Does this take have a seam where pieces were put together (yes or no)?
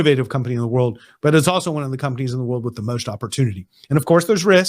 yes